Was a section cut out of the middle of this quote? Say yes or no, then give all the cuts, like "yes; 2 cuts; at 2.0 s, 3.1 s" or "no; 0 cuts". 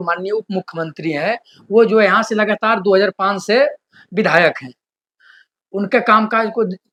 no; 0 cuts